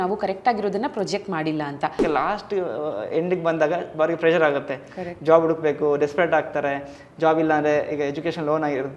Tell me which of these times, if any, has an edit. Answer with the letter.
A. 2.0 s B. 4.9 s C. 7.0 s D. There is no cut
A